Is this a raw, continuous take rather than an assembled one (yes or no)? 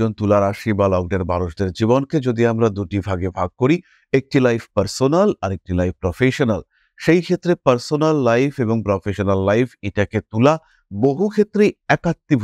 yes